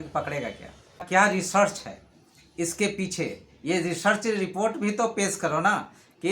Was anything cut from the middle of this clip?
yes; 1 cut; at 1.0 s

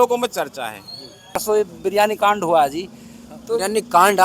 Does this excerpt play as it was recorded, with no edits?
no; 1 cut; at 1.4 s

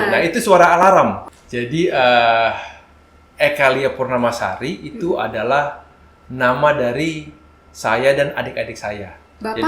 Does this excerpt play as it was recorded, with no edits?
no; 1 cut; at 1.2 s

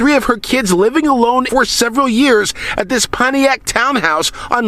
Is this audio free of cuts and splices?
no; 1 cut; at 1.5 s

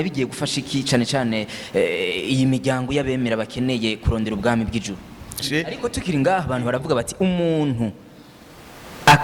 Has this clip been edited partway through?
yes; 1 cut; at 5.4 s

